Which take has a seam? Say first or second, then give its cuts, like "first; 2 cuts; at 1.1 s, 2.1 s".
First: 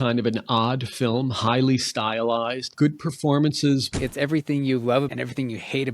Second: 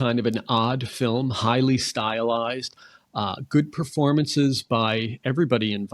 first; 3 cuts; at 2.7 s, 3.9 s, 5.1 s